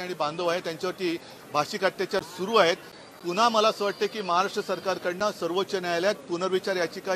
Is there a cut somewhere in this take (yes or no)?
yes